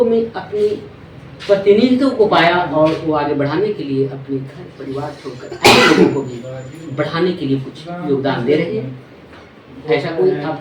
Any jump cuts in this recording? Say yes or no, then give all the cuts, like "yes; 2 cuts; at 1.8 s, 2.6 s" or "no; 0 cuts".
no; 0 cuts